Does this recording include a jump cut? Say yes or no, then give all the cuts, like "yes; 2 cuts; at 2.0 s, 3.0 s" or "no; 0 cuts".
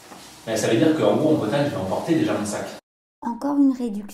no; 0 cuts